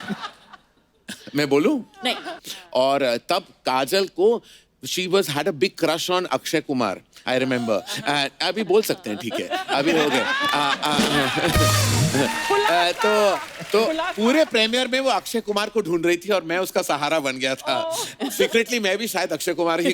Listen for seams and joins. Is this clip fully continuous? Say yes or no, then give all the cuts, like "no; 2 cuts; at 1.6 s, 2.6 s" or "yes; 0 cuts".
no; 1 cut; at 2.3 s